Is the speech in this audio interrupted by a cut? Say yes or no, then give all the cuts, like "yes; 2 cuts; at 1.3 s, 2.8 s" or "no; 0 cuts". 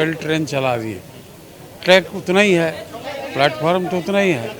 no; 0 cuts